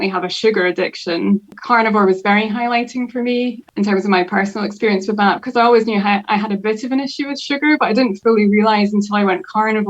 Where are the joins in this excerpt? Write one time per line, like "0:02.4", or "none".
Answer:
0:01.5
0:03.6